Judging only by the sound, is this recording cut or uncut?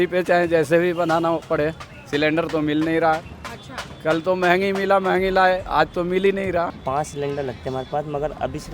cut